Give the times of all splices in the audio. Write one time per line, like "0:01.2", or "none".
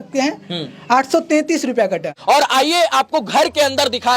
0:02.1